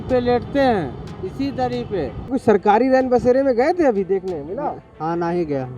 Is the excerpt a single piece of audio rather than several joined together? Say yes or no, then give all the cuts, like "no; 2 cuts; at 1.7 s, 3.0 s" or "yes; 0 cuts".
no; 1 cut; at 2.3 s